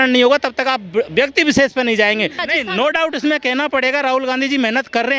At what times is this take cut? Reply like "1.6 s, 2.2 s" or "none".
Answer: 2.4 s